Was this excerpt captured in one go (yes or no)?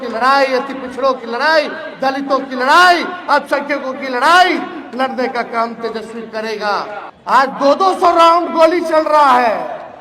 no